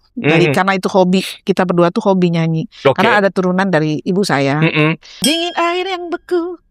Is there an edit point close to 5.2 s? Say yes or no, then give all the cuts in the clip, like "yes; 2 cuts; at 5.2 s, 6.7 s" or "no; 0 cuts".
yes; 1 cut; at 5.2 s